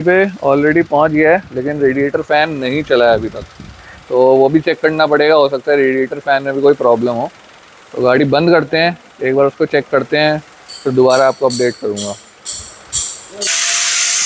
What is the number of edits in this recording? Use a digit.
0